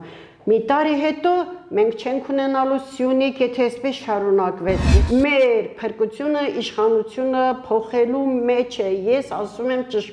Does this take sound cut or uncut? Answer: cut